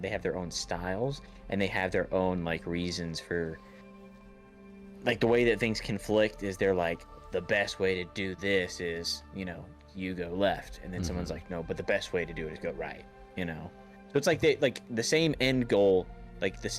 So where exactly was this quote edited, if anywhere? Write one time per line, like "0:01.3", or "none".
none